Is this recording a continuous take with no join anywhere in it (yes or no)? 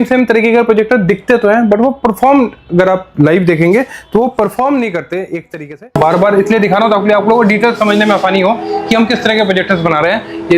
no